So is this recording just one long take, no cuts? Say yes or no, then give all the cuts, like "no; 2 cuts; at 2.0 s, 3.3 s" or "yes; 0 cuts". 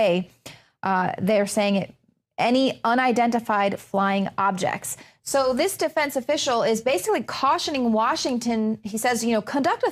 yes; 0 cuts